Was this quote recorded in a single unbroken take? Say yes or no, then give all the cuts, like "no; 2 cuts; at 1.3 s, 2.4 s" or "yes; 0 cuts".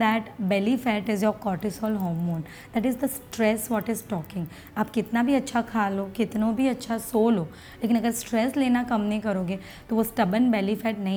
yes; 0 cuts